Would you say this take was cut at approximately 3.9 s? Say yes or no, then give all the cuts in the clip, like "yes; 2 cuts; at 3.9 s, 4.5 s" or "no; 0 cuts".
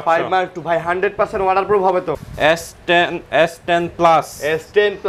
no; 1 cut; at 2.2 s